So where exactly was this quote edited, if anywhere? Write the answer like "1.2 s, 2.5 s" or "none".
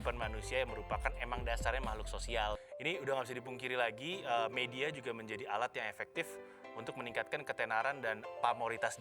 2.6 s

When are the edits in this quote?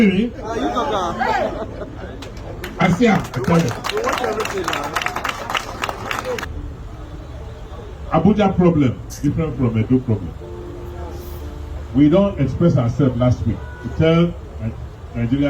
6.5 s

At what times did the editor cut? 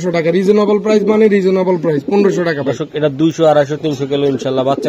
none

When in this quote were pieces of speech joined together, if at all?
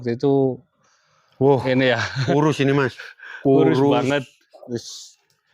none

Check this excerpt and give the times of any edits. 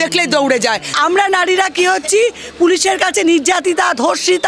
0.9 s

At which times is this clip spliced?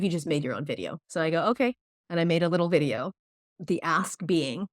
1.0 s

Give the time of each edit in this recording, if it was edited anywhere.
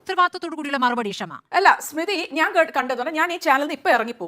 1.5 s

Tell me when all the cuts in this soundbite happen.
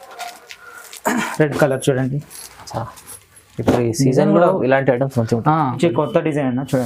5.8 s

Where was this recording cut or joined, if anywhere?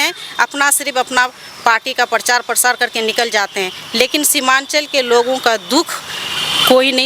none

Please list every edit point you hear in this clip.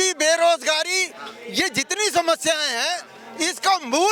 none

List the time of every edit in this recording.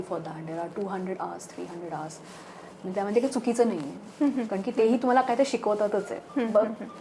none

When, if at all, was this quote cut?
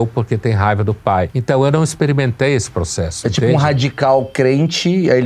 1.3 s

